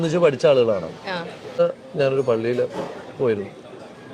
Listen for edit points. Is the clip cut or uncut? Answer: cut